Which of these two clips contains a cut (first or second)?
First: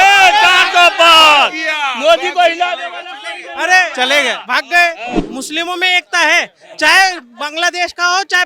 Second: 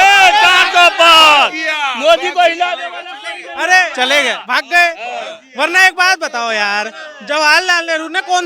first